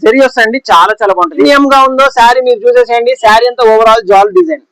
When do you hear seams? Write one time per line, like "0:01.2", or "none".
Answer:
0:01.5